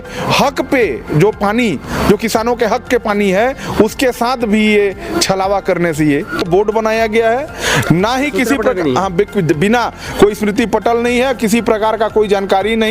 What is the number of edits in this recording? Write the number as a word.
one